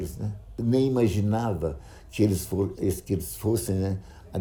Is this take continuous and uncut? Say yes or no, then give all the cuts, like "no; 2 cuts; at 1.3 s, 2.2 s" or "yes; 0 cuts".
yes; 0 cuts